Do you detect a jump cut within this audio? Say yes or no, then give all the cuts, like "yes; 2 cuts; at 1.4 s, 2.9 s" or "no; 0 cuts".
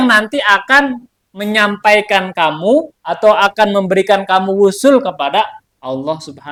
no; 0 cuts